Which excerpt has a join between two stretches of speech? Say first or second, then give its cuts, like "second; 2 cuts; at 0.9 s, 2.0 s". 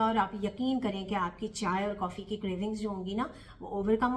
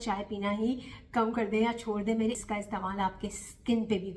second; 1 cut; at 2.4 s